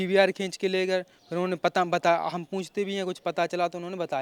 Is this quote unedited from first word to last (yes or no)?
yes